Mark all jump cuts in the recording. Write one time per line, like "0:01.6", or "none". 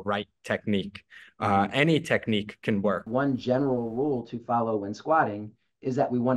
0:03.1